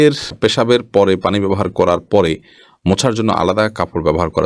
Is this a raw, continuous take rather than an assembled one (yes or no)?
yes